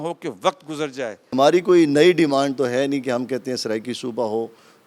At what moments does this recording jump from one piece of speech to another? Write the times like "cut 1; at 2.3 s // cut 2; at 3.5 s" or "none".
cut 1; at 1.3 s